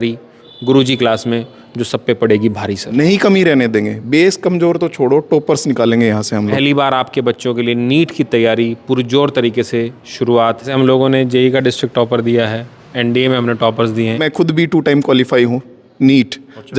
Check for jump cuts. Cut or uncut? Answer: cut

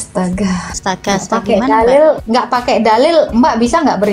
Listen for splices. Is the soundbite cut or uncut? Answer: cut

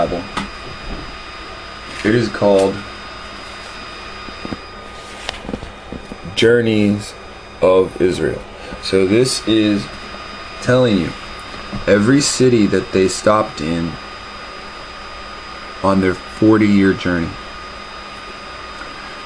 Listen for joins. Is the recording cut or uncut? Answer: cut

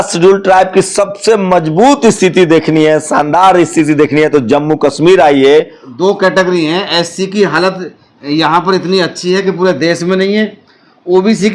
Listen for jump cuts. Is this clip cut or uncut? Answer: cut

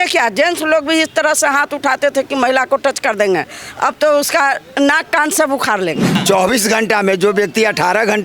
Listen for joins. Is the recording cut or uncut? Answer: cut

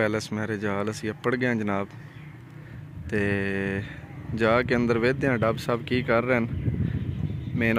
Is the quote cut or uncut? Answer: uncut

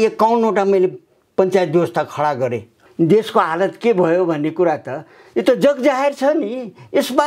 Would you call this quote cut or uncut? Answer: cut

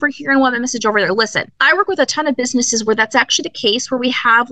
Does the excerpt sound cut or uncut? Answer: cut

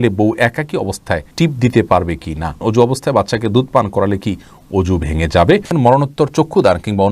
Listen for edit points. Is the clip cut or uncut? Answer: cut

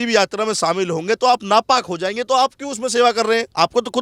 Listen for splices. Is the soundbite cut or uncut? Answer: uncut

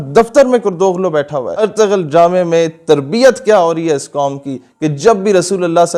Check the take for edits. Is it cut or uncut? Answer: cut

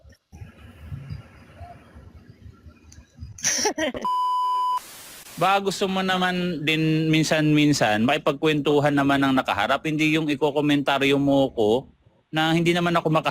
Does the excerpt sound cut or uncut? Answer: cut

